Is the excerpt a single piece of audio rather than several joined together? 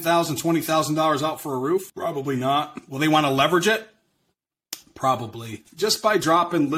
no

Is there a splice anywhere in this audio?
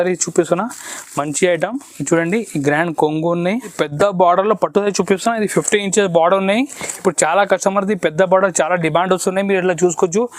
yes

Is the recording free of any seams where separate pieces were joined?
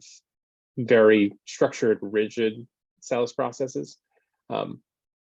no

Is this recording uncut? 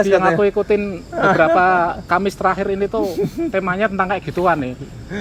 yes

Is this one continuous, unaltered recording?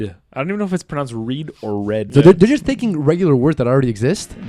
no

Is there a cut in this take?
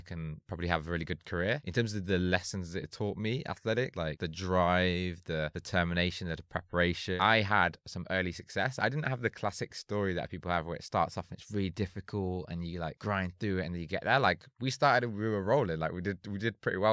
yes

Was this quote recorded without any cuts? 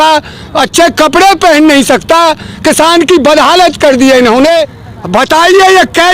no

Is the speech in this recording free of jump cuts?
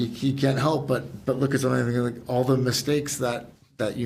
yes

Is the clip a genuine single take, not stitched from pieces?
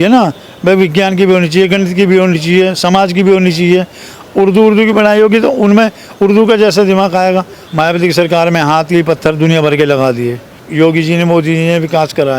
no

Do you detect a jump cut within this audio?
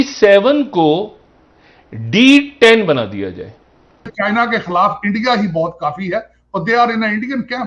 yes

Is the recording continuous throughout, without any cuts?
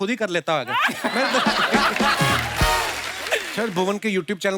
no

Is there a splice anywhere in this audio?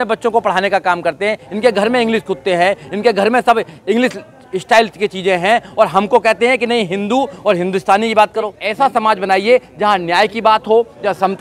yes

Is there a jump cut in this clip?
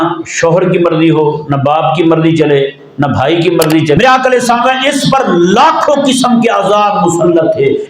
yes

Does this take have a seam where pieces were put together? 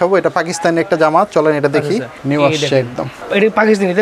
no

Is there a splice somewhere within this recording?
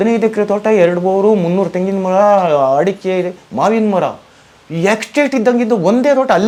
no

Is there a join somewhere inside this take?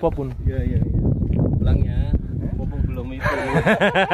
yes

